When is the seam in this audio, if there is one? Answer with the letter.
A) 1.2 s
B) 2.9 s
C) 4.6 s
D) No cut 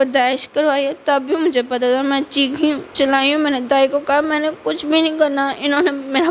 D